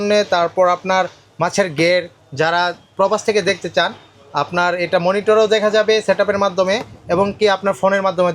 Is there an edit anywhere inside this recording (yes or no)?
no